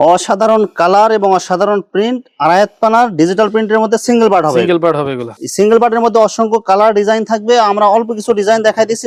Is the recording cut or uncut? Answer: uncut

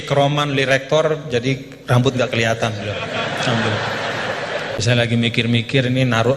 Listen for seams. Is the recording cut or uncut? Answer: cut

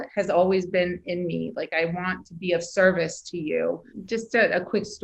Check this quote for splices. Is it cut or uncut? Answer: cut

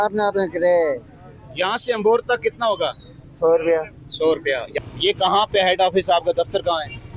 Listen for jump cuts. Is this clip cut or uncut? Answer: cut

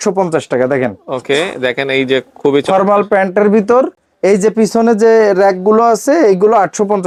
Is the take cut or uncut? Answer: uncut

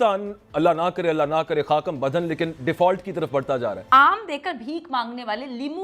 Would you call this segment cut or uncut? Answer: cut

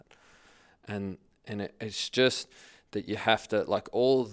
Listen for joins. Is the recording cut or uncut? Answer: uncut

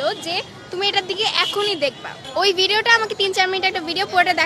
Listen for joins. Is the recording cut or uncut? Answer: cut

